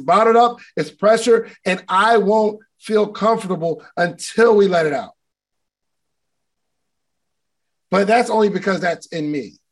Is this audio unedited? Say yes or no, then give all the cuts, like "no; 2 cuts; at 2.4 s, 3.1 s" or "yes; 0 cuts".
yes; 0 cuts